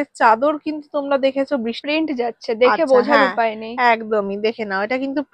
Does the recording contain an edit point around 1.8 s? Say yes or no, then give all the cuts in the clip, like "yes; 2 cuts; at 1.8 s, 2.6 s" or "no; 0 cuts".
yes; 1 cut; at 1.8 s